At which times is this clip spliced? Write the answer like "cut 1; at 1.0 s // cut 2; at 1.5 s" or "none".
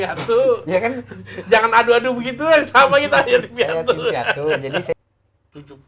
cut 1; at 4.9 s